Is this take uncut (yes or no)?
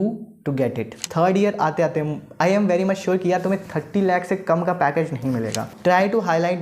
no